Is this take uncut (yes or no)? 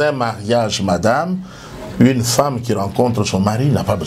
yes